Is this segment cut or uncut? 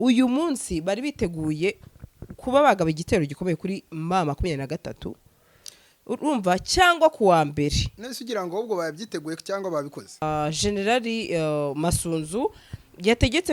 cut